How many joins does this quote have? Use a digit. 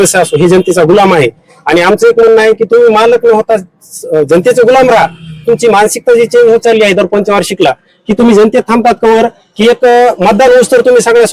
0